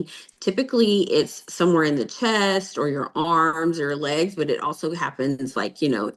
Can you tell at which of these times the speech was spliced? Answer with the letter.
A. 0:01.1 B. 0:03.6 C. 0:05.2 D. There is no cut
D